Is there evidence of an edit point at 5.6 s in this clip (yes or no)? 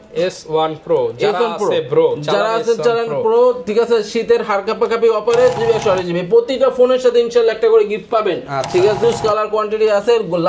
yes